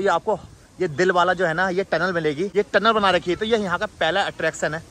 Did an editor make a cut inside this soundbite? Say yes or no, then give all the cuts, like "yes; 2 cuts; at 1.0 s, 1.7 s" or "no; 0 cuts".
no; 0 cuts